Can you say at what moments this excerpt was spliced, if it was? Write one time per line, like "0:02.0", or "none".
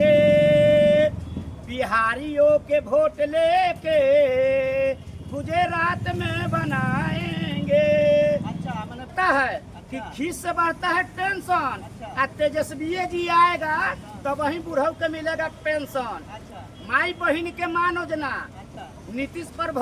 0:09.1